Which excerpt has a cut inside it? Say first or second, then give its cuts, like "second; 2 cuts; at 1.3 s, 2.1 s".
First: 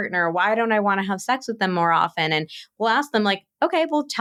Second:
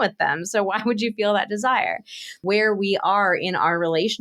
second; 1 cut; at 2.4 s